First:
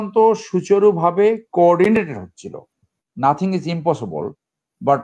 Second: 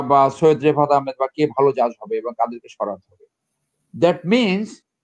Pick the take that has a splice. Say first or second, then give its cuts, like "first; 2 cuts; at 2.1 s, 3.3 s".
first; 1 cut; at 3.0 s